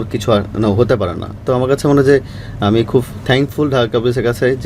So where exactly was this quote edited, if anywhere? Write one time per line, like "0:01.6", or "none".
none